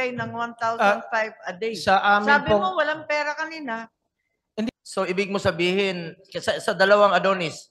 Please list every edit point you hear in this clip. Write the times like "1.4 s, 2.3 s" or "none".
4.7 s